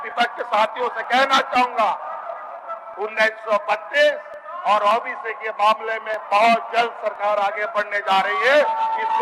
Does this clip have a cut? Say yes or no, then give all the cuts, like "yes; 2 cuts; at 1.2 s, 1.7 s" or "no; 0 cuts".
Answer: no; 0 cuts